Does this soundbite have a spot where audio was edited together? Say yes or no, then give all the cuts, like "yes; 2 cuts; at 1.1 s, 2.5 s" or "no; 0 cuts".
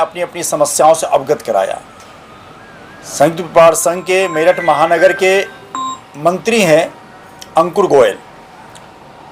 no; 0 cuts